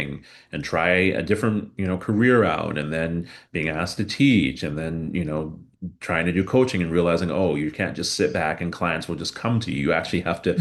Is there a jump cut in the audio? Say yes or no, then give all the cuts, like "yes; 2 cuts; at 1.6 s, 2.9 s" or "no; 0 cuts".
no; 0 cuts